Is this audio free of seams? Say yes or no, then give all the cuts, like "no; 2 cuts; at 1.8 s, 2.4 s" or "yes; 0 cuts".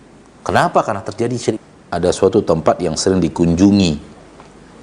no; 1 cut; at 1.6 s